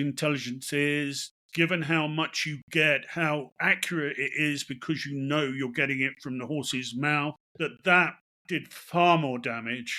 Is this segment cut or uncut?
cut